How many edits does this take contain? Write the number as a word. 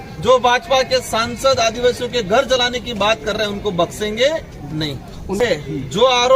one